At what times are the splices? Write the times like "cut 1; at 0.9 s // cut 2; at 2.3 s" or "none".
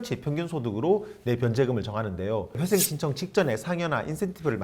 cut 1; at 2.6 s

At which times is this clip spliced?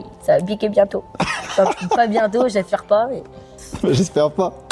cut 1; at 3.6 s

